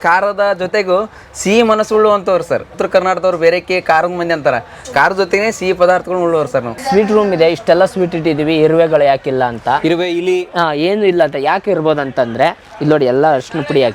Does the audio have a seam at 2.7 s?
yes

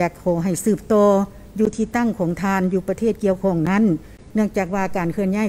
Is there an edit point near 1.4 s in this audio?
no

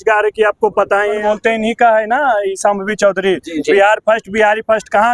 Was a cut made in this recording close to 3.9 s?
no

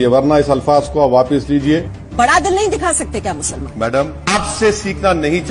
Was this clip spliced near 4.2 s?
yes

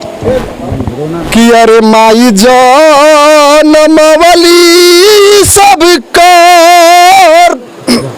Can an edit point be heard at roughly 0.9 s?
yes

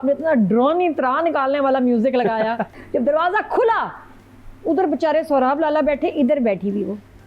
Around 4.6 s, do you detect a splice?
no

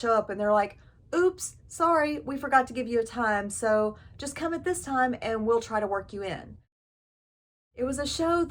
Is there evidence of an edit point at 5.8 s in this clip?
no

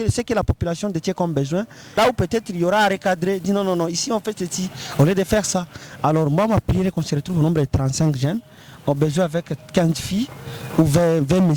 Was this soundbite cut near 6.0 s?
no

